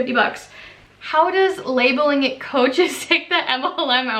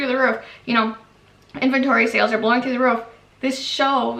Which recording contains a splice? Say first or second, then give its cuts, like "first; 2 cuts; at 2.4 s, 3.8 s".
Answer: first; 1 cut; at 0.9 s